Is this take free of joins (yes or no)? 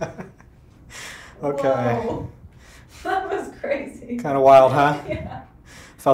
yes